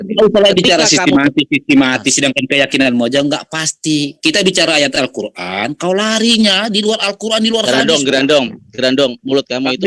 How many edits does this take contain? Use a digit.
0